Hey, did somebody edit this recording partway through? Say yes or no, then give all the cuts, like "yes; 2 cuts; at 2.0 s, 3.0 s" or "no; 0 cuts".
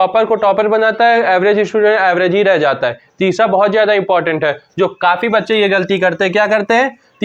no; 0 cuts